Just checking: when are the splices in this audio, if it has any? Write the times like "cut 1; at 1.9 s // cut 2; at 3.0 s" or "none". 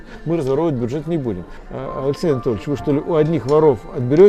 cut 1; at 1.5 s